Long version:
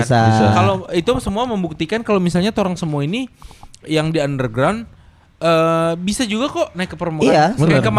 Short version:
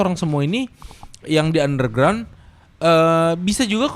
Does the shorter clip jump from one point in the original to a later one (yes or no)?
no